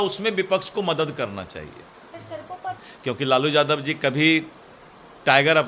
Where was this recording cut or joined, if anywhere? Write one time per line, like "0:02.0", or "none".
0:02.8